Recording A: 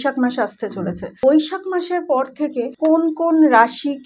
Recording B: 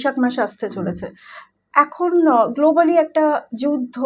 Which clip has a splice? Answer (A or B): A